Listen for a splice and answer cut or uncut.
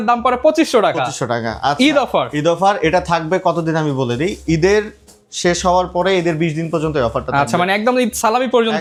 uncut